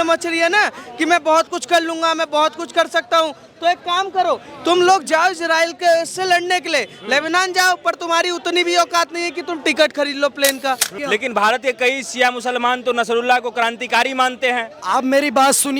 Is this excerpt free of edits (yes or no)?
no